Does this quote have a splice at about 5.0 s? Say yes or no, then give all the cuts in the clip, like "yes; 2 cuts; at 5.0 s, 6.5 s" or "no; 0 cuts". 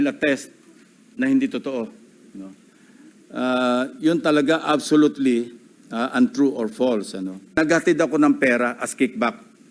no; 1 cut; at 7.6 s